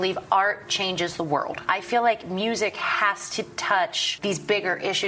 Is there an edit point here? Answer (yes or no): yes